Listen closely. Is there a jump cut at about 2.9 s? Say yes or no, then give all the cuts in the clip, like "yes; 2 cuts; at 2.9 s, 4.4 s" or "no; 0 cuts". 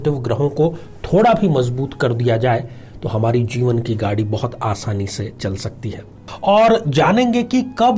no; 1 cut; at 6.2 s